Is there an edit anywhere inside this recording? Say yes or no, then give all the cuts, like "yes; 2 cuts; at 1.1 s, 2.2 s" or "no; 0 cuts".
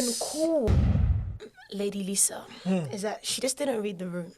yes; 1 cut; at 1.0 s